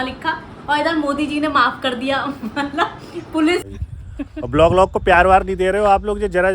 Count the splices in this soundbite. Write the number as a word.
one